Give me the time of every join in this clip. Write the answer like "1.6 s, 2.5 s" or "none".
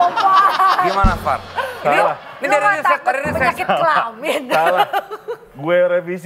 none